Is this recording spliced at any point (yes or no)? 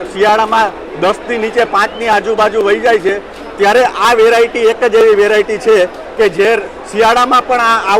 no